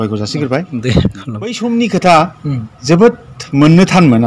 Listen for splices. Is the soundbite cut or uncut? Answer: cut